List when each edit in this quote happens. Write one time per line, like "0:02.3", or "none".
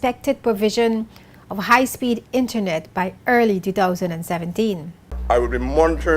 0:05.2